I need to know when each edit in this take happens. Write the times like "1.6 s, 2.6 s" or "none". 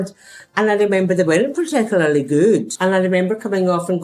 2.7 s